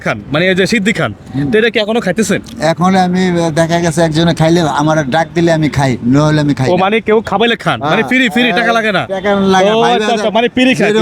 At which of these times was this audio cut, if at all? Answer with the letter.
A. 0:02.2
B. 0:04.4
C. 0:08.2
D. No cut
D